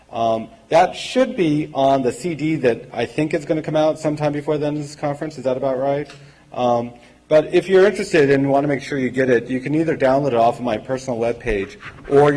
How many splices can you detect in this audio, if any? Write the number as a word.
one